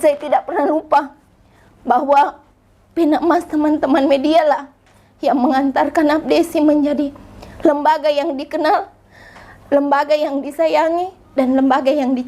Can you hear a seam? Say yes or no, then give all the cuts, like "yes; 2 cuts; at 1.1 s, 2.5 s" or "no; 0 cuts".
no; 0 cuts